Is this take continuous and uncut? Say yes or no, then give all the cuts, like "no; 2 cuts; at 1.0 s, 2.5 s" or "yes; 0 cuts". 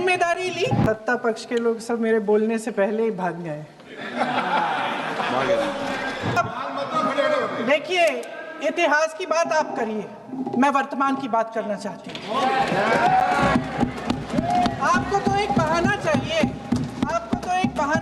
no; 2 cuts; at 0.8 s, 6.4 s